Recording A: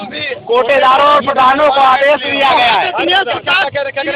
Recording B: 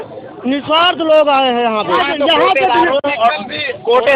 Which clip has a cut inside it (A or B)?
B